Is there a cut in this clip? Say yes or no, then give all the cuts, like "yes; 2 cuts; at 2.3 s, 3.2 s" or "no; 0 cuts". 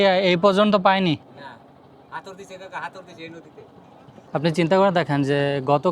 yes; 1 cut; at 4.2 s